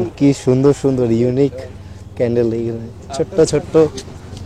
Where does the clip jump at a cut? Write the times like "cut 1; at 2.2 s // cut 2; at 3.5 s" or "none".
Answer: none